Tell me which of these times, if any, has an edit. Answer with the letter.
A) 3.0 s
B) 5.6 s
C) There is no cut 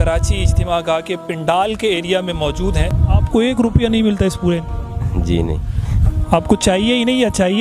A